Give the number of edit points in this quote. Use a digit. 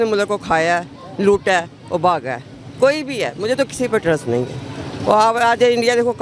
0